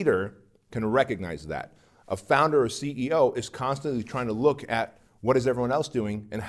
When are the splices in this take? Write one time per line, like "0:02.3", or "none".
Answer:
none